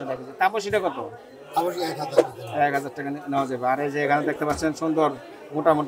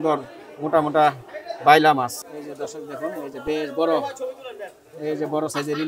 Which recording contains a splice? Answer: second; 1 cut; at 2.2 s

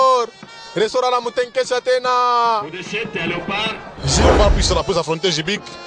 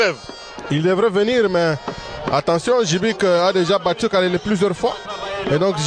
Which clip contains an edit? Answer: first; 1 cut; at 4.2 s

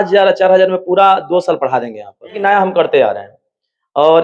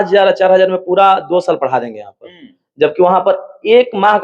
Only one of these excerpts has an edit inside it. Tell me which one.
first; 1 cut; at 2.4 s

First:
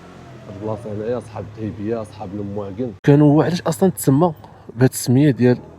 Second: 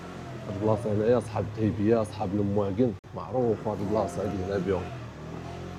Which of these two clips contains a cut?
first; 1 cut; at 3.0 s

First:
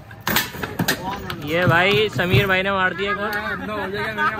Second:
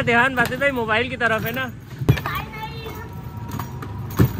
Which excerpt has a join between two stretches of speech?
second; 1 cut; at 2.0 s

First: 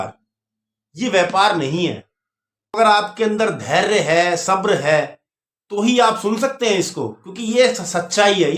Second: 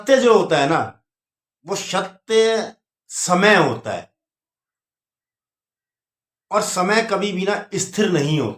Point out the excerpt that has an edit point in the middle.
first; 1 cut; at 2.8 s

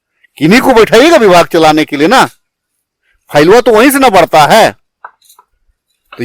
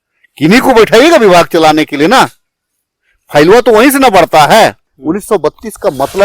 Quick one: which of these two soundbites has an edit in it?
second; 1 cut; at 4.9 s

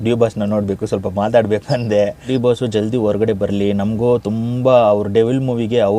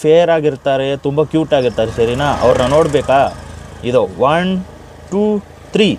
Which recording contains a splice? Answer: first; 1 cut; at 2.2 s

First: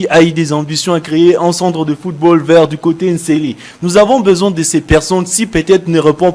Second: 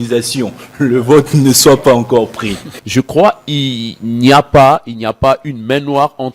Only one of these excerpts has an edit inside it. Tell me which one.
second; 1 cut; at 2.8 s

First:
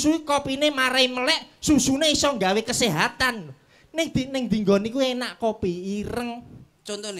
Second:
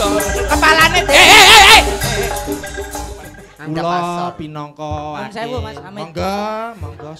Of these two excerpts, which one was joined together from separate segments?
second; 1 cut; at 3.1 s

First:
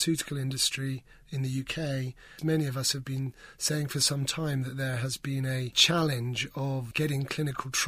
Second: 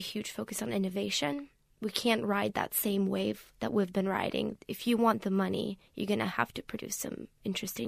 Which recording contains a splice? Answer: first; 3 cuts; at 2.4 s, 5.8 s, 6.9 s

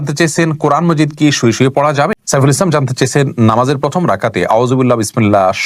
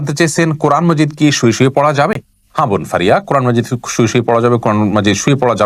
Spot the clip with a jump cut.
first; 1 cut; at 2.2 s

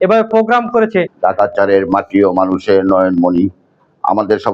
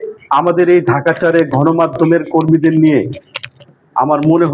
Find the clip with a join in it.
first; 1 cut; at 1.1 s

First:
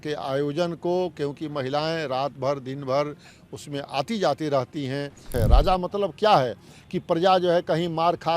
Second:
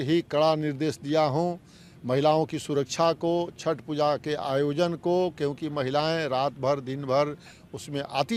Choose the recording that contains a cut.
first; 1 cut; at 5.3 s

